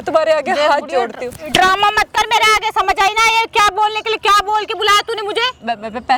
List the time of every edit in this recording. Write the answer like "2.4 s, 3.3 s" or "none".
none

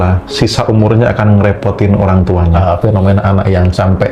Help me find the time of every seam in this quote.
2.6 s

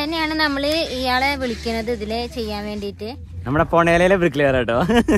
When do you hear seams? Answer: 3.3 s

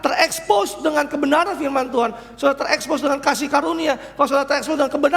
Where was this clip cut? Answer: none

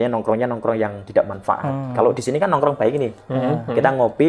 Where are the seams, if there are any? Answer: none

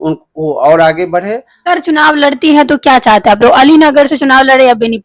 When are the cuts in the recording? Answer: 1.5 s

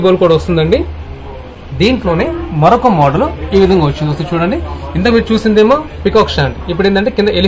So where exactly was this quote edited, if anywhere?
none

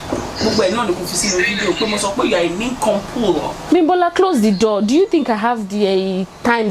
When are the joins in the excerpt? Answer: 3.6 s

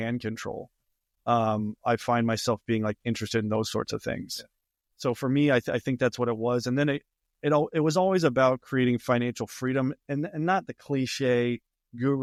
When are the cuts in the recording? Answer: none

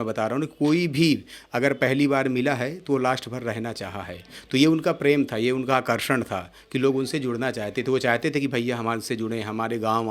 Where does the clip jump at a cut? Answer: none

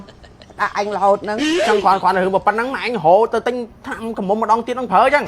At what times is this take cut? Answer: 1.6 s

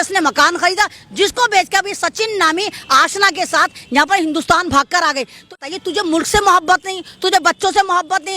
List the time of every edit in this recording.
5.6 s

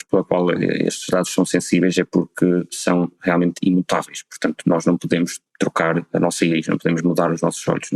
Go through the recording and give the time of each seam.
none

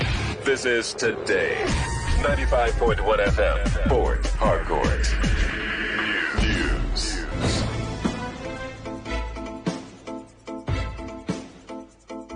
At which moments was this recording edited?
none

